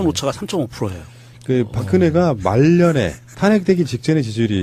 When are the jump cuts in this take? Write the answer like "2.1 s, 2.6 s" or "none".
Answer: none